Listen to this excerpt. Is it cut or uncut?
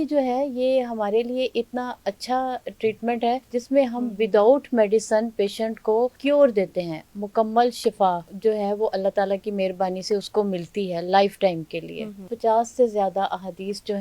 cut